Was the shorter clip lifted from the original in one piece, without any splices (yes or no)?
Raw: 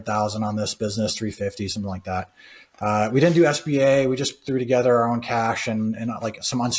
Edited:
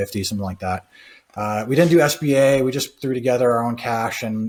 yes